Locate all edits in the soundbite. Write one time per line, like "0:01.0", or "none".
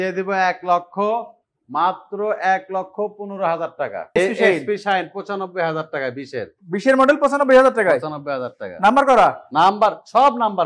0:04.2